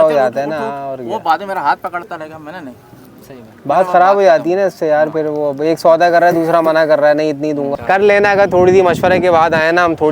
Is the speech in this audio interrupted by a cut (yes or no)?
yes